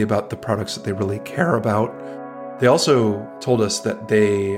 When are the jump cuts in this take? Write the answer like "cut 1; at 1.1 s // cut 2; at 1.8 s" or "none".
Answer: cut 1; at 2.0 s // cut 2; at 3.3 s